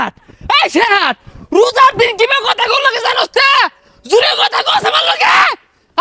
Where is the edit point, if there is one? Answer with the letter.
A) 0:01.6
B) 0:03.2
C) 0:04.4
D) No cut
D